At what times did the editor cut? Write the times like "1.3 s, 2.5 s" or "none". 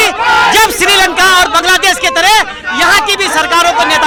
none